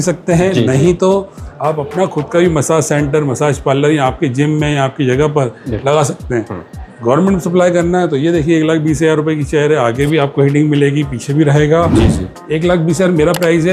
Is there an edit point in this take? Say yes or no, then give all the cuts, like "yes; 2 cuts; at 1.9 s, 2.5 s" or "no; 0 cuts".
no; 0 cuts